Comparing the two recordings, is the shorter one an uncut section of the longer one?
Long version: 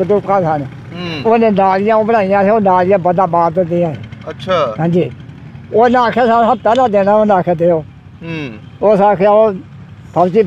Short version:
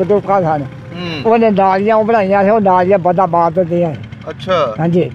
yes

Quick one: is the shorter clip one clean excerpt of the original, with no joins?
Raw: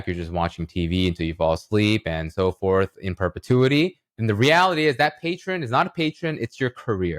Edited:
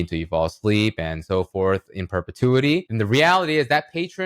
no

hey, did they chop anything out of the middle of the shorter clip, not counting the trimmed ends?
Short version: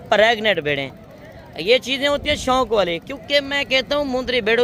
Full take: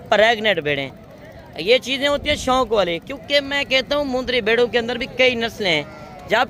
no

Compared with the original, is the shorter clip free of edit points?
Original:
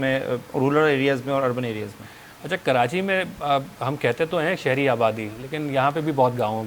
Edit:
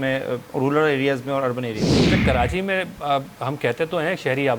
no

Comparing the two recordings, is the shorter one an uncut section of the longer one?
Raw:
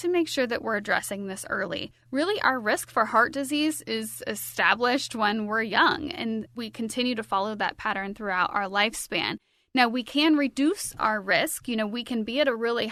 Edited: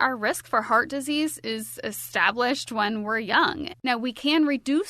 no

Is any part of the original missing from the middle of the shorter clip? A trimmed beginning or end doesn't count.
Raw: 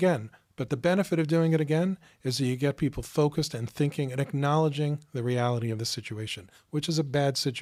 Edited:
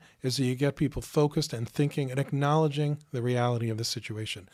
no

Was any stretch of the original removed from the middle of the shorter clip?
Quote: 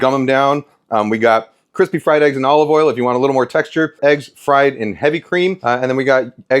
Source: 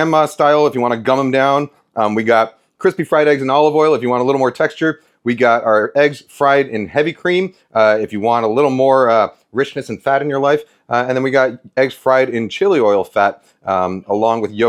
yes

